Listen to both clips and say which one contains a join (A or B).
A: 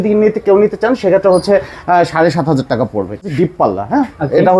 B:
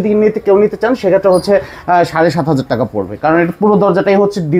A